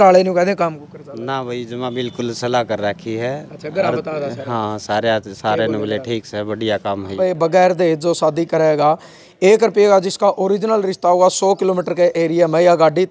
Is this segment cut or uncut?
cut